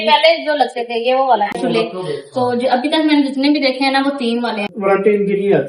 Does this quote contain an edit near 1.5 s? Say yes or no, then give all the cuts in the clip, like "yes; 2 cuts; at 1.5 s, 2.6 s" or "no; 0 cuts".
yes; 2 cuts; at 1.5 s, 4.7 s